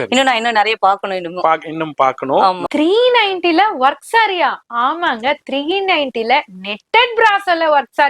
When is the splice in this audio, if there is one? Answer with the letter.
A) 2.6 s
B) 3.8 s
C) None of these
A